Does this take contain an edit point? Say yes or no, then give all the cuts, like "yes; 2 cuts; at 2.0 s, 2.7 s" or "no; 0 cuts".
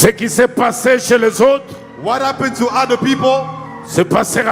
no; 0 cuts